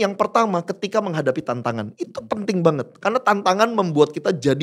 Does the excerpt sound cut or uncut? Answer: uncut